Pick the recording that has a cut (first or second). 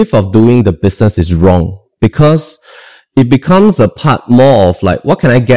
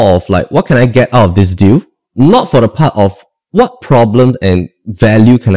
second